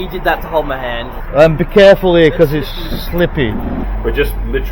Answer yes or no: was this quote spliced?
yes